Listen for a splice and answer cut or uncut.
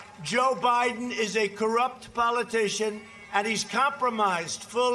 uncut